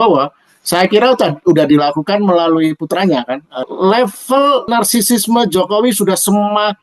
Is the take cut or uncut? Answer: cut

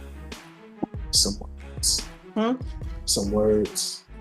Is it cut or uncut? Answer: uncut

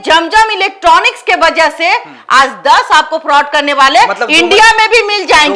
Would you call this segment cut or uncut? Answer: uncut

